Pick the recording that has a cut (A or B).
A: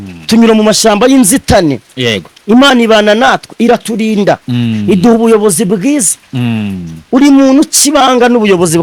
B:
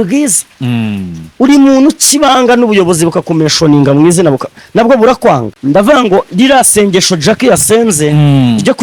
B